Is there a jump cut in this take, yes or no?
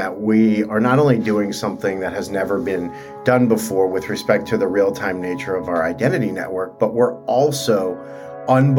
no